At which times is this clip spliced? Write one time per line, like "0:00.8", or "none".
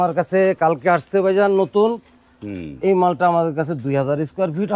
none